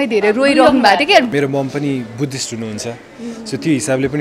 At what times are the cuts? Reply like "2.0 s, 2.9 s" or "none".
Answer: 1.3 s